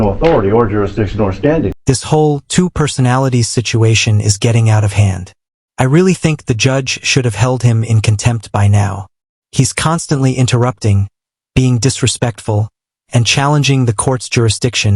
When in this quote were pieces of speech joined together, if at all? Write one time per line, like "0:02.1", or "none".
0:01.8